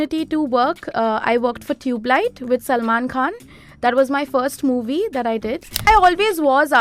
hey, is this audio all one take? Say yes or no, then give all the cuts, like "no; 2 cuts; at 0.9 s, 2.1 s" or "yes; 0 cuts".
no; 1 cut; at 5.9 s